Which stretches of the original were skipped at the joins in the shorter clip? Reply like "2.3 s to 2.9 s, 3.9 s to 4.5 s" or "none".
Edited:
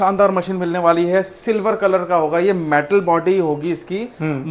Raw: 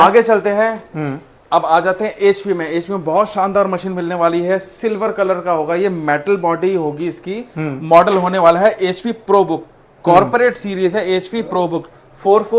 none